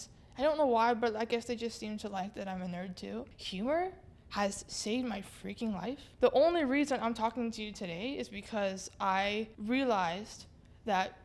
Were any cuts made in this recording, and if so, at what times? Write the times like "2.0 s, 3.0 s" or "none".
3.3 s, 6.1 s, 9.5 s